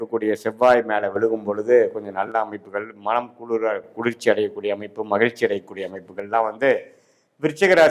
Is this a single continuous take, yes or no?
yes